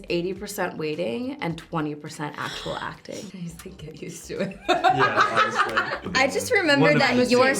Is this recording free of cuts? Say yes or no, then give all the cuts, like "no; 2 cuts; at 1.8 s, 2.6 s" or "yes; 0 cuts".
no; 2 cuts; at 3.3 s, 6.1 s